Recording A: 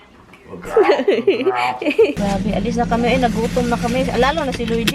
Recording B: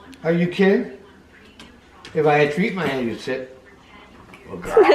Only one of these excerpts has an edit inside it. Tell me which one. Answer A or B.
A